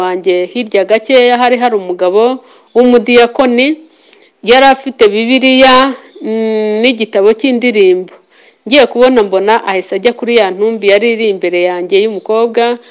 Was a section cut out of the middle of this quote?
no; 0 cuts

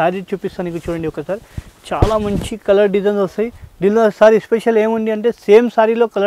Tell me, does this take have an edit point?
no; 0 cuts

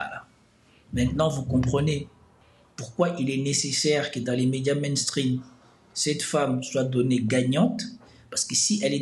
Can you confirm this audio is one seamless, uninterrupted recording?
yes; 0 cuts

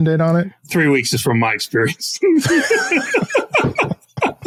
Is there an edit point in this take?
no; 0 cuts

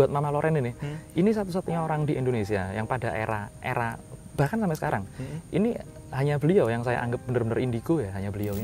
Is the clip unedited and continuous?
yes; 0 cuts

